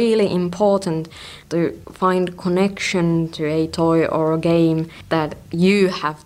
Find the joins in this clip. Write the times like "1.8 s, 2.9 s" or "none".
1.7 s

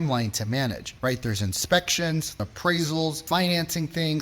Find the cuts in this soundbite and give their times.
0.9 s, 2.4 s, 3.2 s

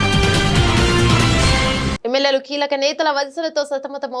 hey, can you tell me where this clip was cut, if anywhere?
1.9 s

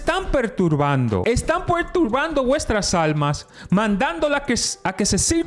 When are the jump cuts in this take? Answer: 1.2 s

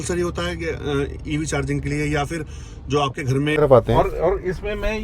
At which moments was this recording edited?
3.6 s

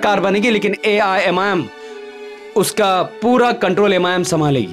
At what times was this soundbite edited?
none

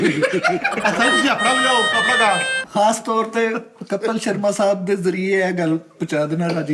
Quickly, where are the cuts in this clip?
2.6 s

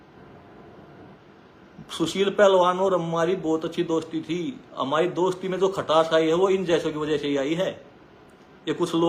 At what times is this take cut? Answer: none

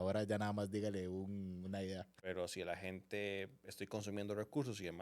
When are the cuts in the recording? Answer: 2.2 s

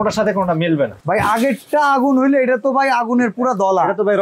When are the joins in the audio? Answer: 1.0 s

